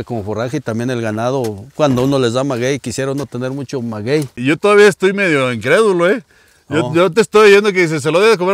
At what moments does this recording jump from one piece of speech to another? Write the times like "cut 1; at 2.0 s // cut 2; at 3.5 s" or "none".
cut 1; at 4.4 s